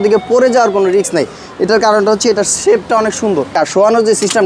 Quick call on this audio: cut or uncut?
cut